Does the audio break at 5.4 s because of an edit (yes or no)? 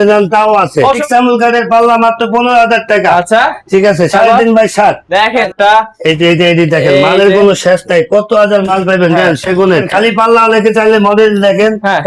yes